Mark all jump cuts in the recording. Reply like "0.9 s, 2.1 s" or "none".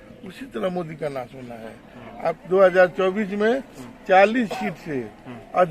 2.4 s